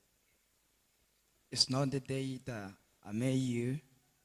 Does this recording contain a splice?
no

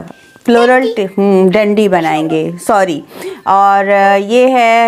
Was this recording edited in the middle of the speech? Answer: no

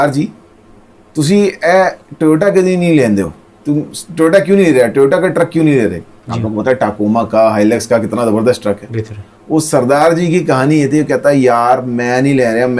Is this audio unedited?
yes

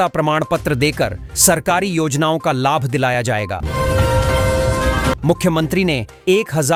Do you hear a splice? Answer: no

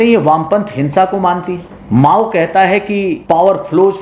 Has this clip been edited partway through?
yes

